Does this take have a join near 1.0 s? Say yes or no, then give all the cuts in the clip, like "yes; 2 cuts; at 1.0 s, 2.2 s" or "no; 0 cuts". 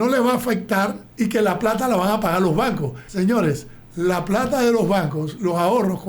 yes; 2 cuts; at 1.0 s, 3.0 s